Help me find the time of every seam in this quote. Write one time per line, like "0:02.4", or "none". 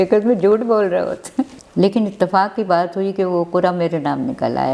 0:01.6